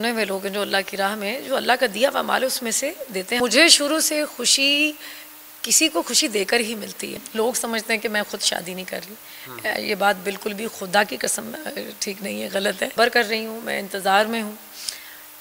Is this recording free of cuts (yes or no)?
no